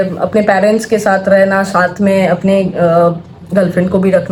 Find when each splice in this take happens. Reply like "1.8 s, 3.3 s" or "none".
none

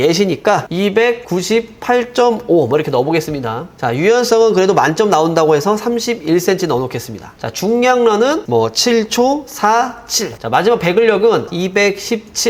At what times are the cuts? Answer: 1.2 s, 3.8 s, 10.4 s, 11.5 s

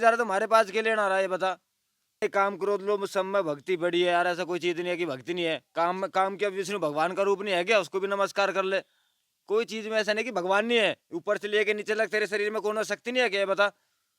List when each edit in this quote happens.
2.2 s

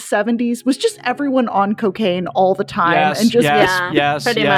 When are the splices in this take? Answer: none

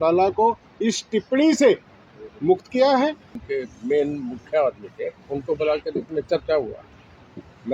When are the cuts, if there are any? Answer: 3.3 s

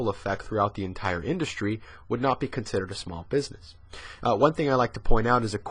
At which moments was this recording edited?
3.7 s

